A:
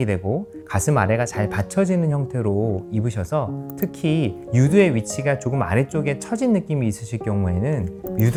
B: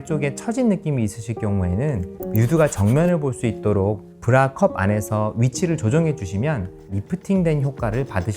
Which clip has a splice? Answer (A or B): B